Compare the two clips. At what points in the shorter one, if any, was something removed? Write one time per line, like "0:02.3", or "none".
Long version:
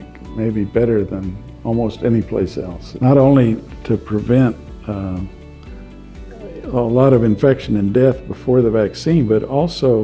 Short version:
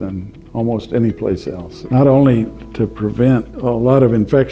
0:03.5